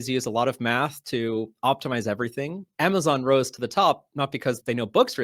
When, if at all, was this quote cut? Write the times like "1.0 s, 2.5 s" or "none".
2.6 s